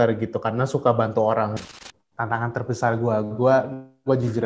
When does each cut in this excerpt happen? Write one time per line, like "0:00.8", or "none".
0:01.5